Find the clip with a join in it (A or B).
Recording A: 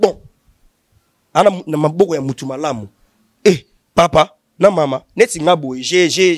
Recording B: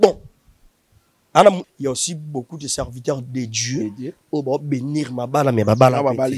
B